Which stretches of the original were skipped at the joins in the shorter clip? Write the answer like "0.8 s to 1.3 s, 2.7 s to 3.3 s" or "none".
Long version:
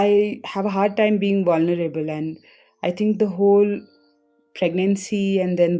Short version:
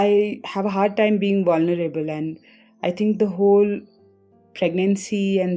none